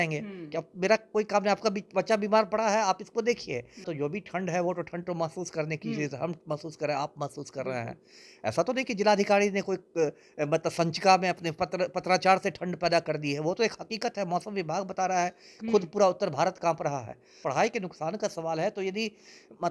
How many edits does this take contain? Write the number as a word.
two